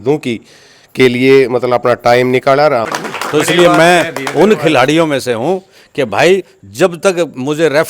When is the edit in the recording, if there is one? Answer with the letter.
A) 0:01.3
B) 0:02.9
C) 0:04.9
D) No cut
B